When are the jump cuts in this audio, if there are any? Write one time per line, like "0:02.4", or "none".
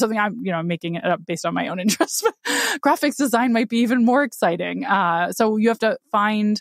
none